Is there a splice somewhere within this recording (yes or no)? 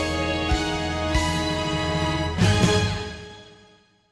no